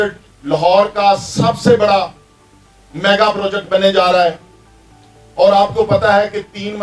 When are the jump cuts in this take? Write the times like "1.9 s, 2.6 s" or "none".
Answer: none